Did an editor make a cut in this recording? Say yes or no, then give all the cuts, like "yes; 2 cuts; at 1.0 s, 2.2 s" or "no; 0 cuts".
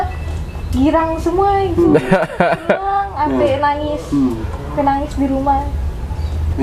no; 0 cuts